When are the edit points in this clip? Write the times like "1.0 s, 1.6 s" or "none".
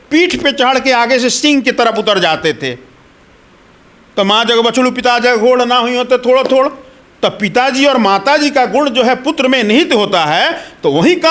none